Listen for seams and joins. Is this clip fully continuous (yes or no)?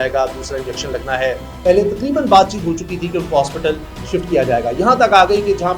no